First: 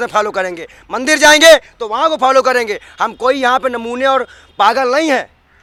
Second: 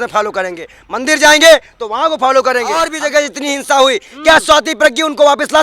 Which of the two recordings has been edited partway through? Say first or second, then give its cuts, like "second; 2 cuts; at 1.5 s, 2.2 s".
second; 1 cut; at 2.9 s